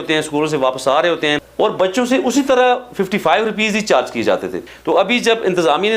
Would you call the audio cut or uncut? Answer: cut